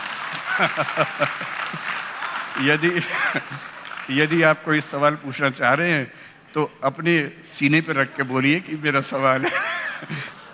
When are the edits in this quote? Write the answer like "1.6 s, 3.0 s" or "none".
none